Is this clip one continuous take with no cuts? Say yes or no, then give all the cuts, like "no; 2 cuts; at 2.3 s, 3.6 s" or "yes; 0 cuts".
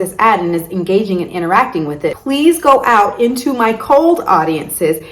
no; 1 cut; at 2.2 s